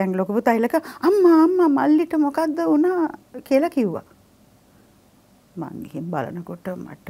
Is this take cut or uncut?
uncut